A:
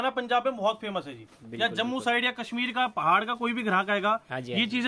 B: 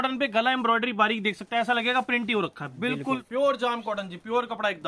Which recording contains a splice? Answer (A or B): B